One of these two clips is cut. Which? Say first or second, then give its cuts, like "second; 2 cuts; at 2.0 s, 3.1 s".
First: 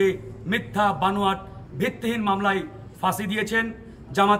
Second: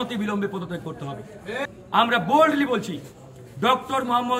second; 1 cut; at 1.6 s